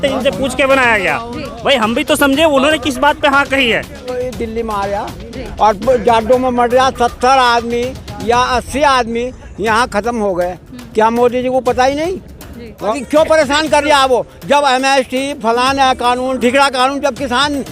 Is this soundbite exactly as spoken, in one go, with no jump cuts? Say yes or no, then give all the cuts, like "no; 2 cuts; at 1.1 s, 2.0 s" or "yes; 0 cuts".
no; 2 cuts; at 4.2 s, 12.9 s